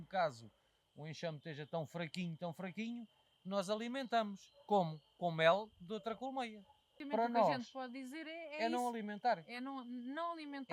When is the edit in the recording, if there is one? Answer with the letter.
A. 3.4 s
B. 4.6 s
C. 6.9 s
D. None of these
C